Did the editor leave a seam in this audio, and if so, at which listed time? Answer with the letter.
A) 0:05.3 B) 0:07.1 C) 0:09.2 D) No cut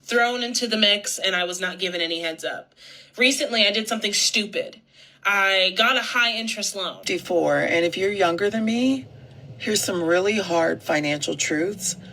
B